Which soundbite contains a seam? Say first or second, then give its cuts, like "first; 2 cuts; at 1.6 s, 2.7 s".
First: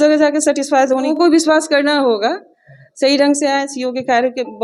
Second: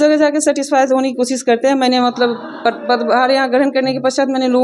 first; 1 cut; at 1.1 s